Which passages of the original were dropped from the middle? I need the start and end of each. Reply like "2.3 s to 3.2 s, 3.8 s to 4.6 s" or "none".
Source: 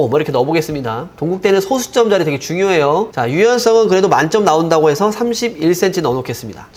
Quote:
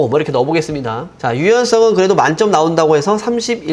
1.2 s to 3.1 s